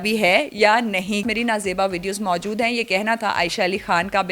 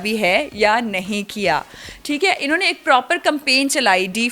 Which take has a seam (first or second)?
first